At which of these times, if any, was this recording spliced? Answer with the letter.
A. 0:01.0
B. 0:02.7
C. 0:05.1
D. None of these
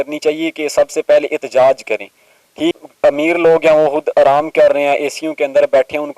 B